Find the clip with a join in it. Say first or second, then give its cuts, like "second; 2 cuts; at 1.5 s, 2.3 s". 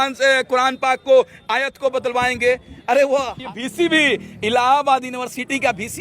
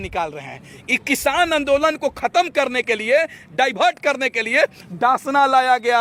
first; 1 cut; at 3.4 s